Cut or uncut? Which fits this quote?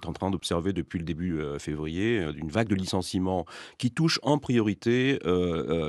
uncut